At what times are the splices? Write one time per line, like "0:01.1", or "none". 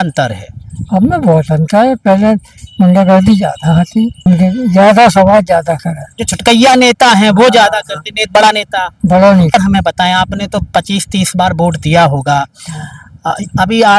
0:04.2
0:09.5